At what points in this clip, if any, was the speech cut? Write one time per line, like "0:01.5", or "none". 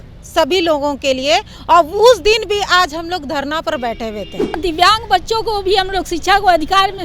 0:04.6